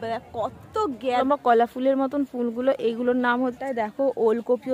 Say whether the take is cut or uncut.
cut